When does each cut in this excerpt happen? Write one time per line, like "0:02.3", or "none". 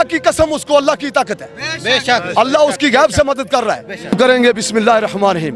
0:04.1